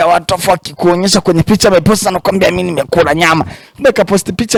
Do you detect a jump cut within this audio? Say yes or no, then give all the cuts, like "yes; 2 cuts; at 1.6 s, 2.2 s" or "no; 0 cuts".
no; 0 cuts